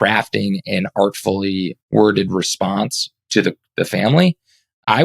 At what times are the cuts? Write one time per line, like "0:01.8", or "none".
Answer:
0:01.8